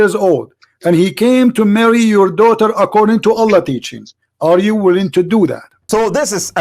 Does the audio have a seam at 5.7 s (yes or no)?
no